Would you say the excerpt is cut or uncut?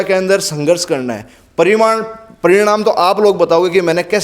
uncut